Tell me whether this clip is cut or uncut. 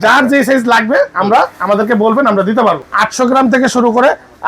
cut